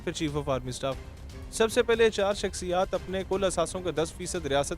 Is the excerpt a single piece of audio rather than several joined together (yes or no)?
yes